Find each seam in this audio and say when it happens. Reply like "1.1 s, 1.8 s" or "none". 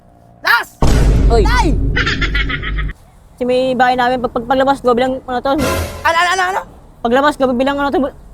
2.9 s